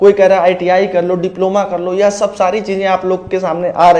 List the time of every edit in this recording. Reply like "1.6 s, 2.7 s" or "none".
none